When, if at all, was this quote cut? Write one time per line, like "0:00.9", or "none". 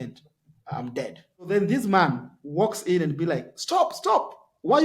0:01.5

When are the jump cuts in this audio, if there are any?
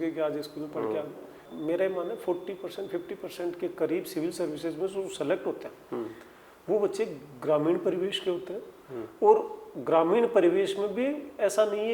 0:01.5

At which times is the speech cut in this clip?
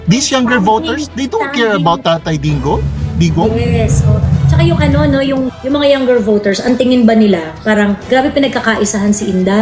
0:05.5
0:08.0

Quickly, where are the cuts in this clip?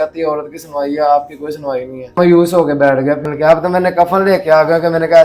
0:02.2
0:03.2

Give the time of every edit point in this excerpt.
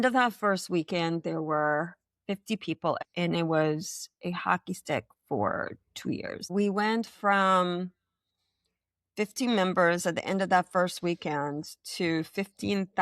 0:03.0
0:06.5

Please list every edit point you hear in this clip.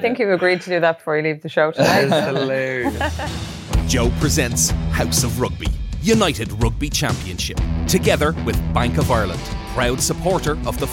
0:03.2

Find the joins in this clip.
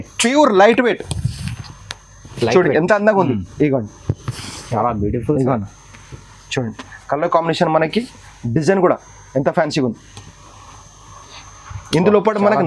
0:04.6

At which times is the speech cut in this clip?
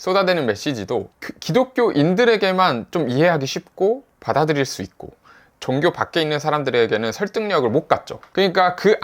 0:05.5

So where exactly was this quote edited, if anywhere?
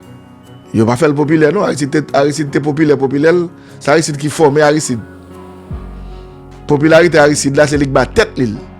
0:00.7
0:05.0
0:06.4

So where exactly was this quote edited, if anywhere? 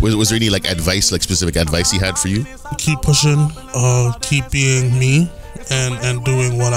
0:02.8

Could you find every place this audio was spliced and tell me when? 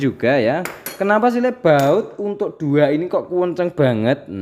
none

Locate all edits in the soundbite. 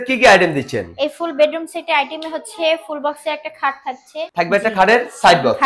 0:04.3

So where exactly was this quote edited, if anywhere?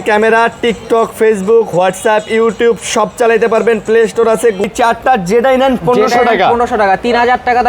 0:04.7

